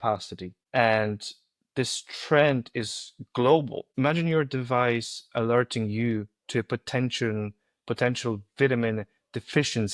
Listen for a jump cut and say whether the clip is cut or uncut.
cut